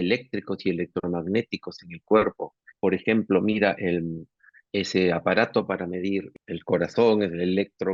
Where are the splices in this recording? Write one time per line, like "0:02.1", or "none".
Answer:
0:02.6
0:04.5
0:06.3